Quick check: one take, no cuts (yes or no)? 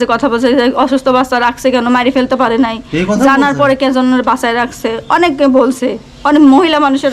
yes